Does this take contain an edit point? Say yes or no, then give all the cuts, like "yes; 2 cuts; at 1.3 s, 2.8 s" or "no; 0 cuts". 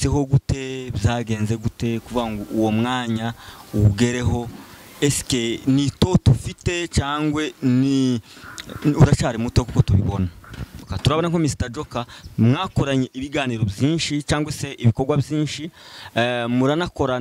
yes; 1 cut; at 10.9 s